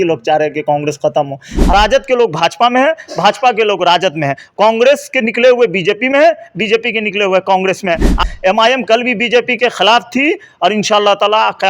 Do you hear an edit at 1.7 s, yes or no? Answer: yes